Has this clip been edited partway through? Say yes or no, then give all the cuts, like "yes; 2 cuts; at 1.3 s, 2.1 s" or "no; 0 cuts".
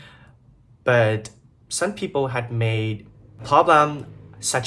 no; 0 cuts